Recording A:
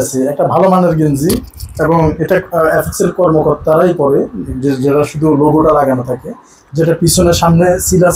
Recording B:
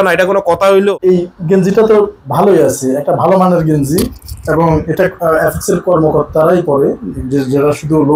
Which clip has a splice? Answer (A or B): B